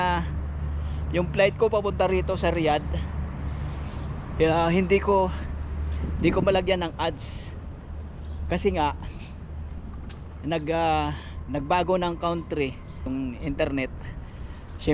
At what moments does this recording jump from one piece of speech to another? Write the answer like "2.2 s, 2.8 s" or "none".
13.1 s